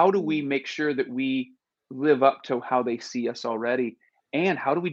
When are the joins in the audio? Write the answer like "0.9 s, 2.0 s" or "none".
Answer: none